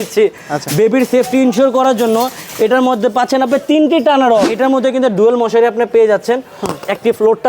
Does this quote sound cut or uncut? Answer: cut